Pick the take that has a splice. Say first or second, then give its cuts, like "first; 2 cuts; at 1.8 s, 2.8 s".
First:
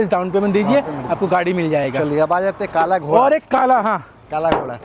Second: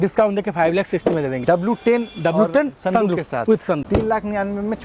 second; 2 cuts; at 1.4 s, 3.8 s